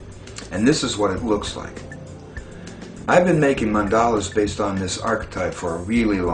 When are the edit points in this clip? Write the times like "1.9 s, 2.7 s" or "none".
1.6 s